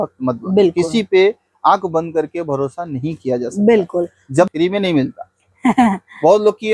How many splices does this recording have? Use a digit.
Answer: 1